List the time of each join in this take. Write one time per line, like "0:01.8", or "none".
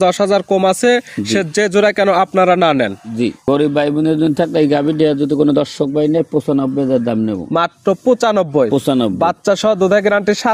0:03.4